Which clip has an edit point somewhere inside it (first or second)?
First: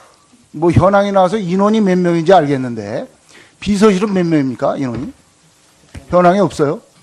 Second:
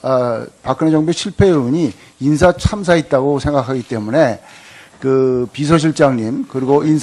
first